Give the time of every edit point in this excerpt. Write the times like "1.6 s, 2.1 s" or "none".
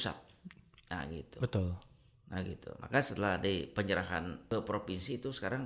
4.4 s